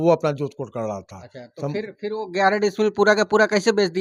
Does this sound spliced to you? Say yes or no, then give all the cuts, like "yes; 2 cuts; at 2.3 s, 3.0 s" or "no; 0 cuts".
no; 0 cuts